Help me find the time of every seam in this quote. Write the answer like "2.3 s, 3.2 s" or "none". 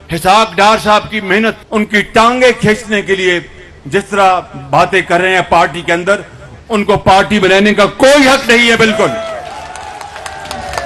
1.6 s